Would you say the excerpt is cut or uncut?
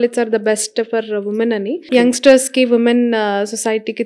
cut